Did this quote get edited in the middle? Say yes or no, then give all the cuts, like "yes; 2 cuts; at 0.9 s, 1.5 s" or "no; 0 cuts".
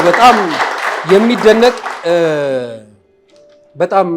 no; 0 cuts